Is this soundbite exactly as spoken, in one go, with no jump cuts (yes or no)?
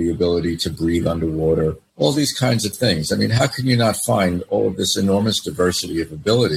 no